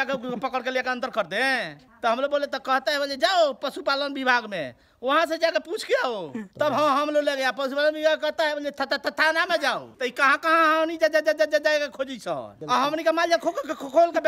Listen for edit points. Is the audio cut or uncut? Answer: uncut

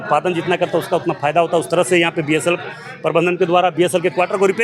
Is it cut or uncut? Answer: uncut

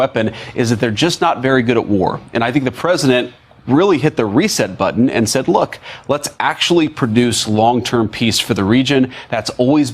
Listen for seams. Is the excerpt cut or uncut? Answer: cut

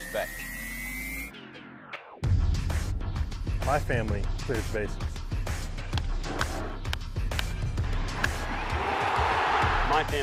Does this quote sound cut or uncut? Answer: uncut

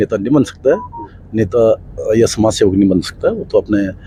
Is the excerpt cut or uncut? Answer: uncut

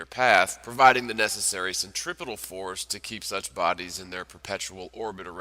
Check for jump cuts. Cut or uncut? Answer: cut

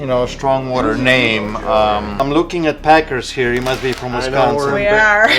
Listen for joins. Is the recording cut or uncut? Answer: cut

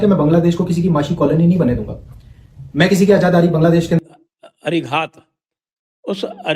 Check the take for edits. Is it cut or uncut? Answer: cut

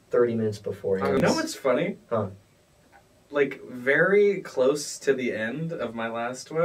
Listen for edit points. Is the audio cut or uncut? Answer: cut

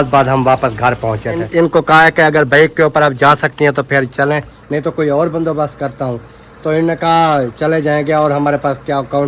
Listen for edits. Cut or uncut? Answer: cut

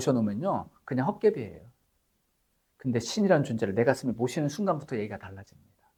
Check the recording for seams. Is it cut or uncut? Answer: uncut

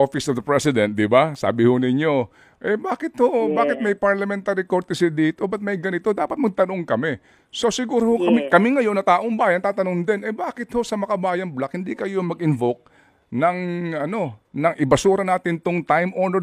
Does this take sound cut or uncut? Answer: uncut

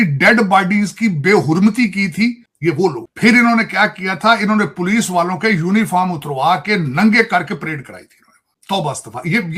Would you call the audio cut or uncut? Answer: cut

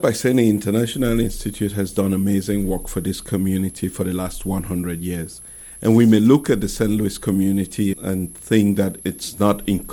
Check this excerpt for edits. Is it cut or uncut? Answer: uncut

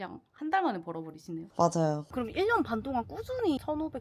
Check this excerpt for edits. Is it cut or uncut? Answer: cut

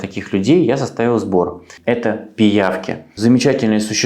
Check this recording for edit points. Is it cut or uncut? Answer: cut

